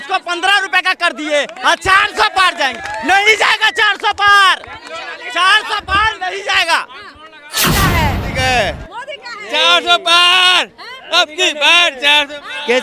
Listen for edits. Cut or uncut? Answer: cut